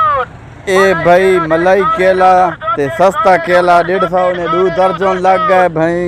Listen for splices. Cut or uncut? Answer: uncut